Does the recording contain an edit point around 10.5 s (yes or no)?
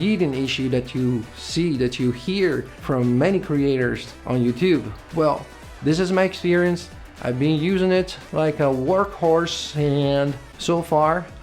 no